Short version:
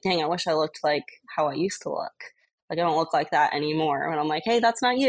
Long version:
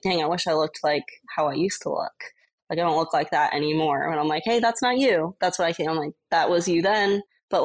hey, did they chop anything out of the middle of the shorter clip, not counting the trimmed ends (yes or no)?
no